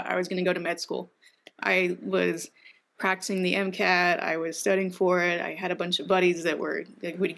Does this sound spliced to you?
no; 0 cuts

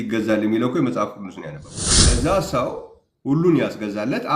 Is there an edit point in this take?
yes; 1 cut; at 2.1 s

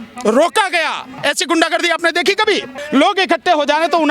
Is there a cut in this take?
yes; 2 cuts; at 1.1 s, 2.8 s

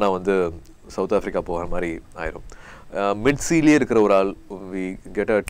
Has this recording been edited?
no; 0 cuts

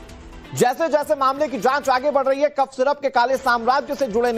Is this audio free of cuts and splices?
no; 1 cut; at 1.8 s

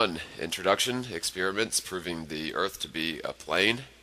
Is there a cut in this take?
no; 0 cuts

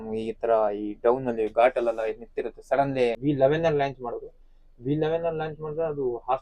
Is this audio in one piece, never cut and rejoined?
no; 1 cut; at 3.2 s

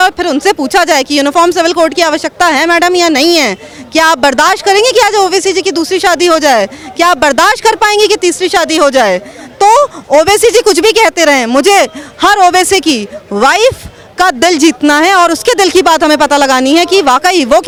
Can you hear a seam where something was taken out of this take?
no; 0 cuts

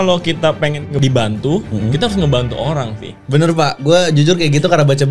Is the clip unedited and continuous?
no; 1 cut; at 0.9 s

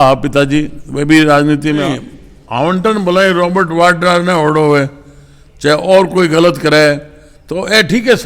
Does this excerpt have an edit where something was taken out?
yes; 1 cut; at 1.9 s

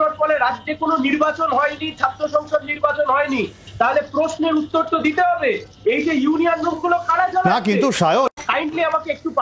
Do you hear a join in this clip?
yes; 1 cut; at 8.4 s

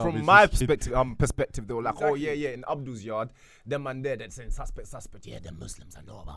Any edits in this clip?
no; 0 cuts

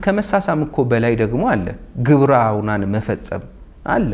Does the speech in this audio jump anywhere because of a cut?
no; 0 cuts

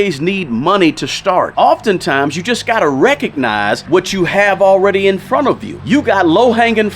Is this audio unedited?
no; 3 cuts; at 1.5 s, 3.8 s, 5.7 s

